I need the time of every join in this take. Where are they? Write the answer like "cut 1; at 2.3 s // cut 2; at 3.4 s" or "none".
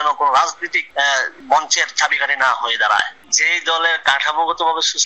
cut 1; at 3.2 s